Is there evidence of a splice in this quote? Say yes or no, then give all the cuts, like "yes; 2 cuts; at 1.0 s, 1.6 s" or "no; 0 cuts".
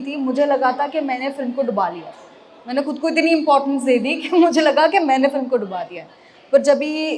no; 0 cuts